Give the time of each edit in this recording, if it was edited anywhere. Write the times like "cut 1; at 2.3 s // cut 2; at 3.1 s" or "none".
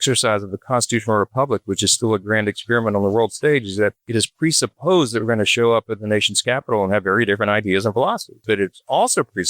cut 1; at 8.4 s